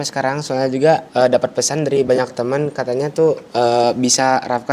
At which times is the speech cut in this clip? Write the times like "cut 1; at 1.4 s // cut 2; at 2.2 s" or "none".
cut 1; at 1.1 s // cut 2; at 3.4 s